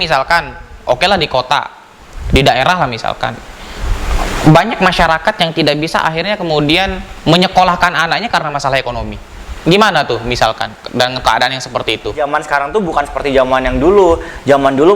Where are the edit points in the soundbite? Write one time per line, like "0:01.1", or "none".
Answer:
0:12.2